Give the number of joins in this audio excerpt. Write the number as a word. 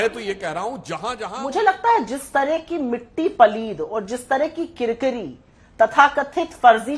one